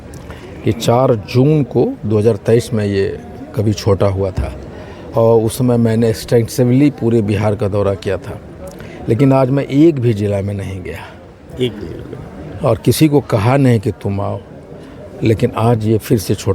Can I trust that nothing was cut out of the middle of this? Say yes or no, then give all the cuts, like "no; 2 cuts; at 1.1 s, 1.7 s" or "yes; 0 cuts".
yes; 0 cuts